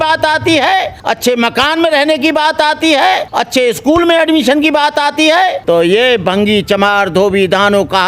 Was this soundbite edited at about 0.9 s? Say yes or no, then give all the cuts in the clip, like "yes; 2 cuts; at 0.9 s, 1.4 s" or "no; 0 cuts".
yes; 3 cuts; at 0.9 s, 3.3 s, 5.6 s